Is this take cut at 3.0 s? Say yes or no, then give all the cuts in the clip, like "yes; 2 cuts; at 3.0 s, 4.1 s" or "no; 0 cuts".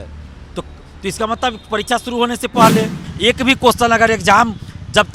yes; 1 cut; at 3.0 s